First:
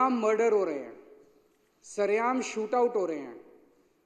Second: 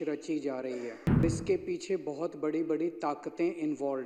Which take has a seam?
second; 1 cut; at 1.2 s

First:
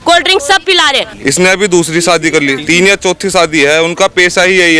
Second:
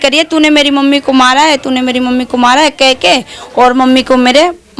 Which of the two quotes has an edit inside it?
first; 2 cuts; at 1.1 s, 2.6 s

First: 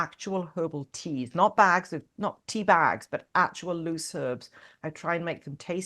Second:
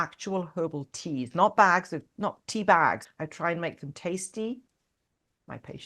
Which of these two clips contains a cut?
second; 1 cut; at 3.0 s

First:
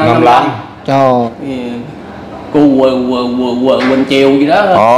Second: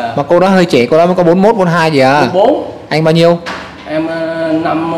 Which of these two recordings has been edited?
first; 1 cut; at 1.3 s

